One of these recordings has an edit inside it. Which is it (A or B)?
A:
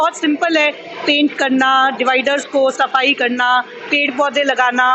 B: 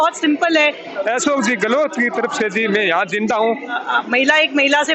B